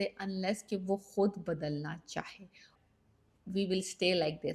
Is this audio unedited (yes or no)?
no